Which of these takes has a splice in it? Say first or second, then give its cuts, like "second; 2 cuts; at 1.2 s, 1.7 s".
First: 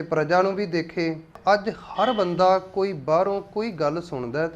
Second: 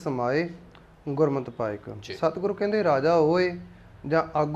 first; 1 cut; at 1.4 s